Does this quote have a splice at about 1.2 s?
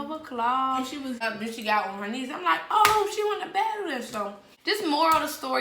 yes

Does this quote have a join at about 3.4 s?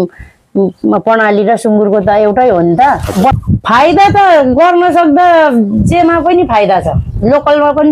yes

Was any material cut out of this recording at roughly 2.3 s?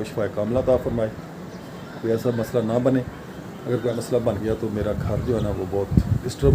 no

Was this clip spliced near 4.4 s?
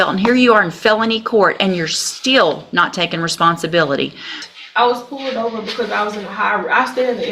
yes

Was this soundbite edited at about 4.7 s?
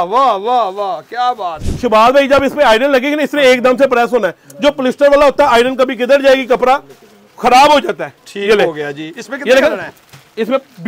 no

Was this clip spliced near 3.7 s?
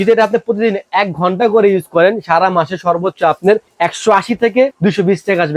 yes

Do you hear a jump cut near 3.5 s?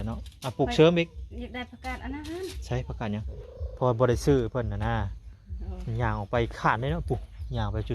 yes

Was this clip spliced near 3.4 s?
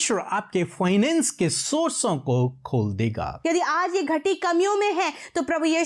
yes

